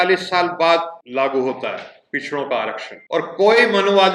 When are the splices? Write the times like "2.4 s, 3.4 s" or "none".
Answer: 1.0 s, 2.9 s